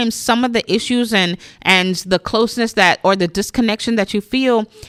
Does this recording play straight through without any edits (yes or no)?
yes